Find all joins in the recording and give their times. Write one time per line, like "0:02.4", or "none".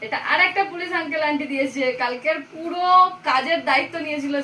none